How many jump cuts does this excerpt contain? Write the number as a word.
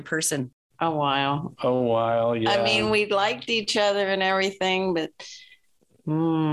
zero